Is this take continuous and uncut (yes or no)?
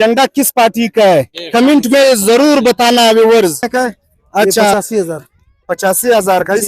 no